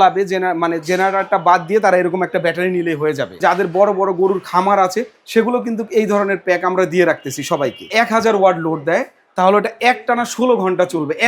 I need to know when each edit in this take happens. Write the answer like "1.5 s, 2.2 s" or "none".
3.4 s, 7.8 s